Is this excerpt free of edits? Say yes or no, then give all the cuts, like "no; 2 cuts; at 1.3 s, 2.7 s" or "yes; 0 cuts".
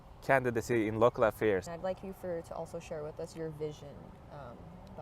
no; 1 cut; at 1.7 s